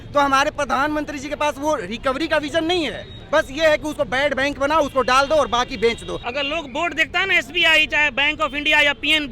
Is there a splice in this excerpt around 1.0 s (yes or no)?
no